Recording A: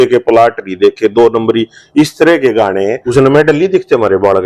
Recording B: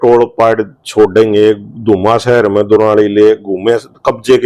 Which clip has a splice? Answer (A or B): A